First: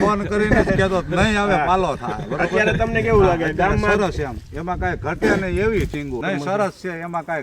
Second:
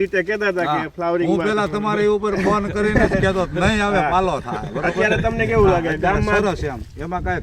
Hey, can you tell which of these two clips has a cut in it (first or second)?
first